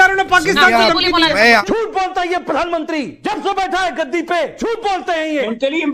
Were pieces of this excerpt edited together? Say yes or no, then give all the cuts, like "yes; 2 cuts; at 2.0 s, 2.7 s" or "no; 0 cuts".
yes; 3 cuts; at 1.6 s, 3.1 s, 4.5 s